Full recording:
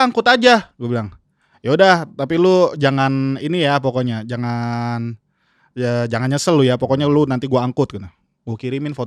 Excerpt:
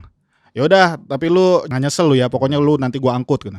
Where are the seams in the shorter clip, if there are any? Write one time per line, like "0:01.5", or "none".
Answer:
0:01.7

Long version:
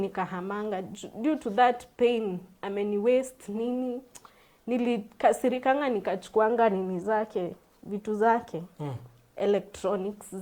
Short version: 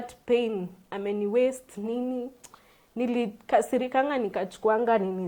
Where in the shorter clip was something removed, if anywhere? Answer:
none

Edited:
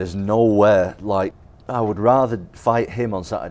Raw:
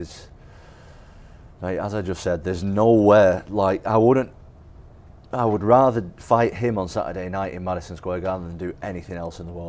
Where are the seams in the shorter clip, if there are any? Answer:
0:01.3

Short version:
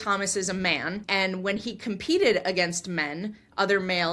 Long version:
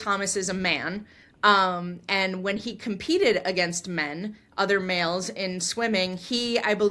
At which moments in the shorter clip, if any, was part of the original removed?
0:01.0

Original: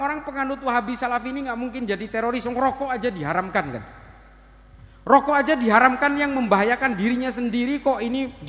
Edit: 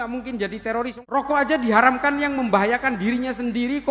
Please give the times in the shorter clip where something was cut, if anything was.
0:00.9

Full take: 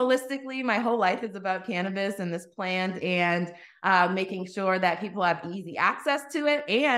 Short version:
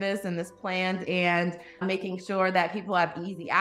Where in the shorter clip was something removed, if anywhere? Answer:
0:01.8

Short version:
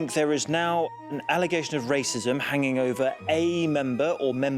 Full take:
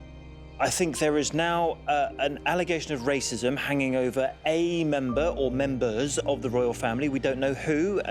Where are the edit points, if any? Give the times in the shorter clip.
0:01.0

